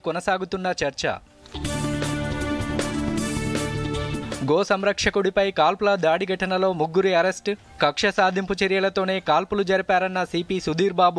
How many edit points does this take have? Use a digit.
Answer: 0